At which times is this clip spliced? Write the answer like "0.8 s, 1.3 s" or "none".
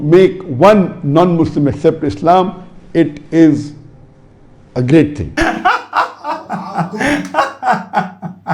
none